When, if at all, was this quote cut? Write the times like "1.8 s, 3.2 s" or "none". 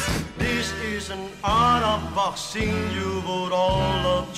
none